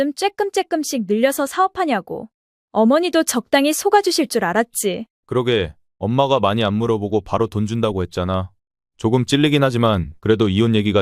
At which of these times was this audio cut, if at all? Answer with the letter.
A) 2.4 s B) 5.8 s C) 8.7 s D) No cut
D